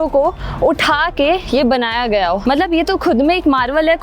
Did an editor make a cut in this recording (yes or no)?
yes